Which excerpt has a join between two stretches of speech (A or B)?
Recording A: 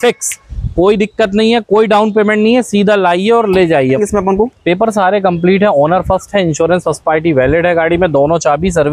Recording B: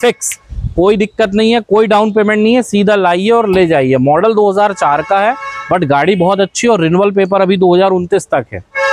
A